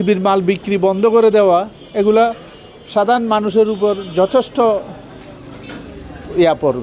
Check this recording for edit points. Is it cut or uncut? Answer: uncut